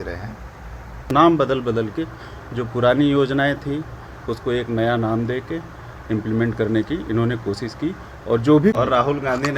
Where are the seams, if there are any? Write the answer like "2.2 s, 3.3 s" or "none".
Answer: 1.1 s, 8.7 s